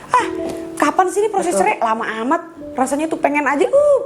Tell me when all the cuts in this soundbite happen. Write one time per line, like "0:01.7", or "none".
none

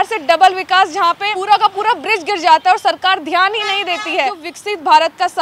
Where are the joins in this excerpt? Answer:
0:01.3
0:04.5

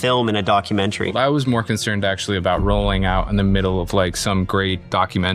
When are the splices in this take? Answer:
0:01.1

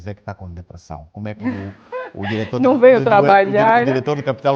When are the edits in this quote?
none

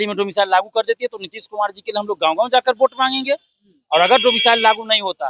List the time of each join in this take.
none

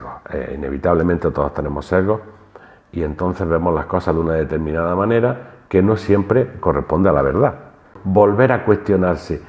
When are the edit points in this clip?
0:08.0

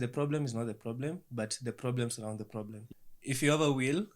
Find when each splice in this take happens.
0:02.8

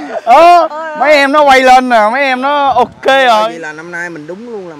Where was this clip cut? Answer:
0:03.5

